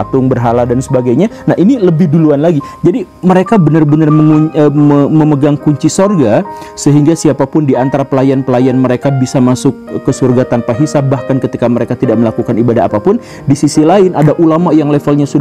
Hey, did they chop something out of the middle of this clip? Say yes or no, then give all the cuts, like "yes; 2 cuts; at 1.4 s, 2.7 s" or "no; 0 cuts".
no; 0 cuts